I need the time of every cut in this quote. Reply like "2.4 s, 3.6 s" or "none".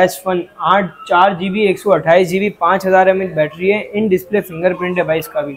none

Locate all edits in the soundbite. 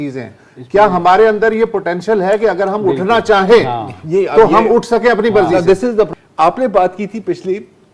6.1 s

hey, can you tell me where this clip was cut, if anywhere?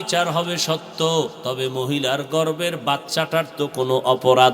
1.4 s

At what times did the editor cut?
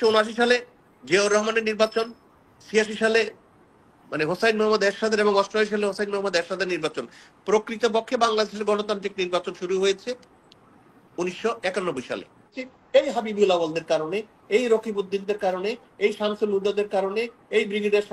12.7 s

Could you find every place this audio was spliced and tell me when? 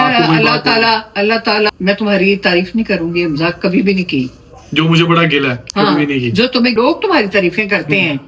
1.7 s, 6.8 s

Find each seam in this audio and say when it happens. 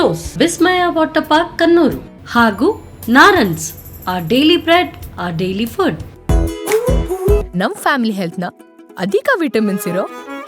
6.1 s

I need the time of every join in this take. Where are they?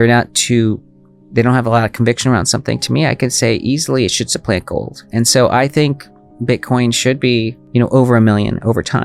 none

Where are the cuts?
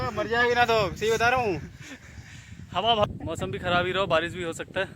3.0 s

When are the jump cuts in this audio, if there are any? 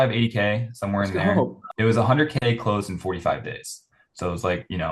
1.6 s

